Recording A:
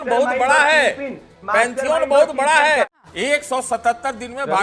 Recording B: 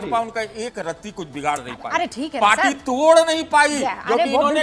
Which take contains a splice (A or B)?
A